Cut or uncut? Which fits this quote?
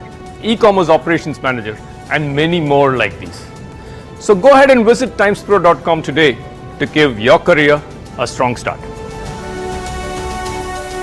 cut